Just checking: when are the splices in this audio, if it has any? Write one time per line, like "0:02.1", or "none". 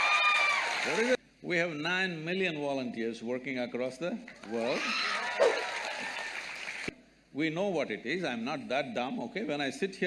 0:01.2
0:06.8